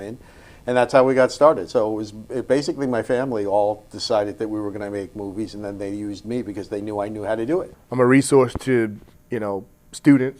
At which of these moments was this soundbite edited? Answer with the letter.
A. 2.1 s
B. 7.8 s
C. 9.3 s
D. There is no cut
B